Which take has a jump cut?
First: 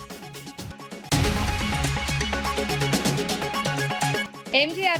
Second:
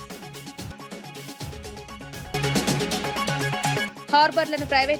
first; 2 cuts; at 1.1 s, 4.2 s

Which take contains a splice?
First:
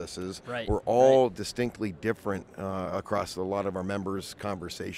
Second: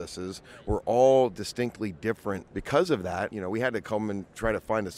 second; 2 cuts; at 2.5 s, 3.3 s

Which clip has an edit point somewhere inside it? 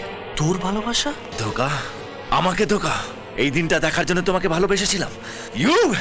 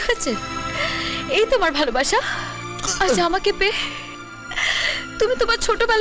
first; 1 cut; at 1.3 s

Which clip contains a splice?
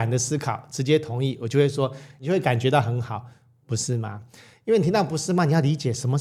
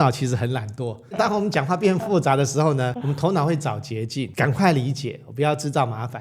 second; 3 cuts; at 1.2 s, 3.0 s, 4.3 s

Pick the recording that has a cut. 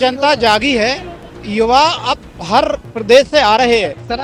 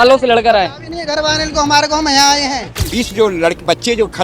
second; 1 cut; at 2.8 s

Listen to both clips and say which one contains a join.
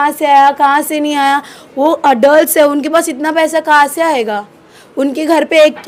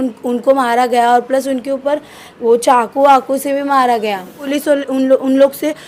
second; 1 cut; at 4.5 s

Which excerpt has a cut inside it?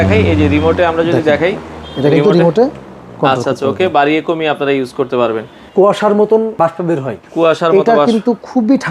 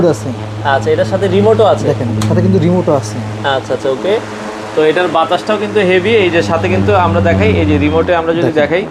first; 2 cuts; at 5.6 s, 6.5 s

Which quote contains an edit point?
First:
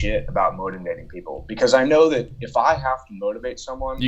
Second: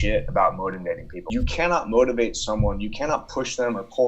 second; 1 cut; at 1.1 s

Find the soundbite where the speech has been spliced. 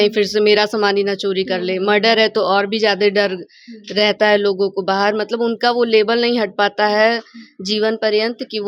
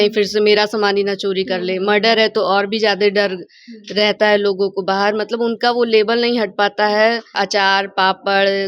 second; 1 cut; at 7.4 s

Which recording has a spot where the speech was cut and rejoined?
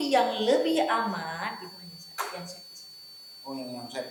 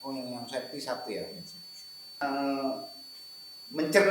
second; 1 cut; at 2.2 s

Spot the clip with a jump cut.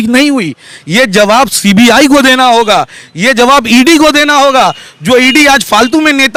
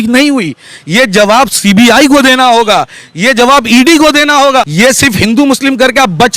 second; 1 cut; at 4.7 s

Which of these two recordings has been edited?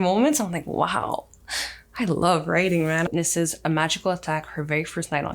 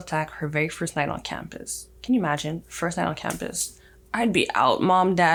first; 1 cut; at 3.1 s

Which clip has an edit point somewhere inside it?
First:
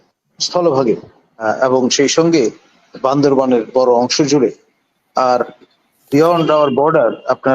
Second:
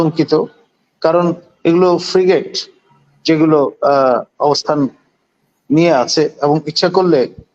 first; 1 cut; at 1.5 s

